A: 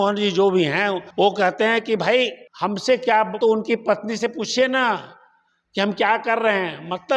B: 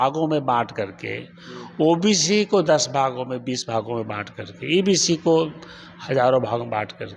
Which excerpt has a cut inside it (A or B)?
A